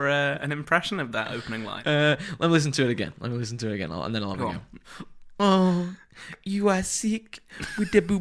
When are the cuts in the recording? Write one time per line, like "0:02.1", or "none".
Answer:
0:01.8